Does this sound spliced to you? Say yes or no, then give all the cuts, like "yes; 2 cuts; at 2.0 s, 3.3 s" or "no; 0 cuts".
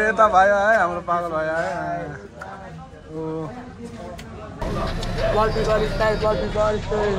yes; 1 cut; at 4.6 s